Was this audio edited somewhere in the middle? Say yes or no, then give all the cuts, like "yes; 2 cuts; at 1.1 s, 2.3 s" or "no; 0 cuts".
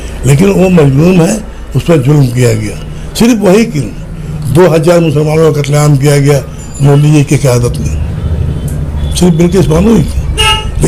no; 0 cuts